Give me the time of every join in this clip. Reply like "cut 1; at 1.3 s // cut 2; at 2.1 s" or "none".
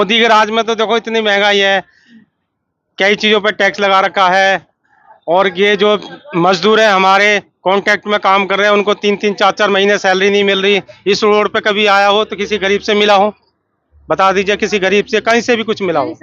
cut 1; at 10.9 s